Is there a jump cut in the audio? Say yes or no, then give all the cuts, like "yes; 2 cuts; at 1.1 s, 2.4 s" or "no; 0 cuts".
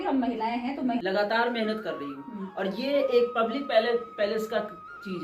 yes; 1 cut; at 1.0 s